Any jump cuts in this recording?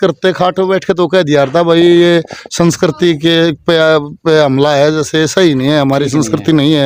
no; 0 cuts

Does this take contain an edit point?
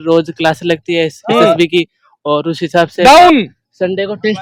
no; 0 cuts

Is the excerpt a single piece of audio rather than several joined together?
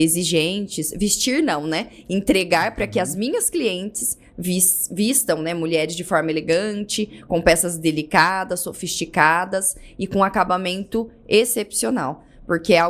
yes; 0 cuts

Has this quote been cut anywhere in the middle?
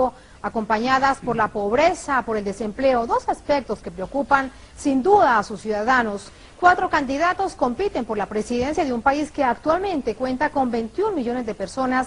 no; 0 cuts

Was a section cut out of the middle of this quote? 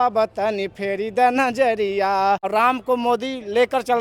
yes; 1 cut; at 2.4 s

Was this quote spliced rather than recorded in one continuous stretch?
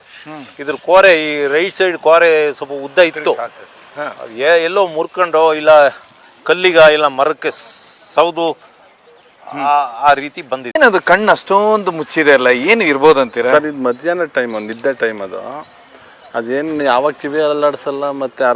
no; 0 cuts

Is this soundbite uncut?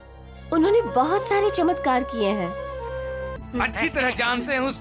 no; 1 cut; at 3.3 s

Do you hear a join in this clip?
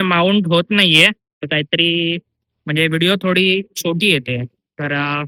no; 0 cuts

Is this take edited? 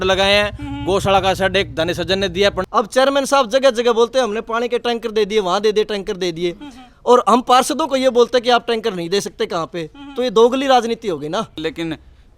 yes; 2 cuts; at 2.6 s, 11.6 s

